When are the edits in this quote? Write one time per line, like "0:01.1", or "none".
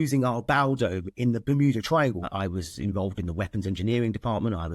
0:02.3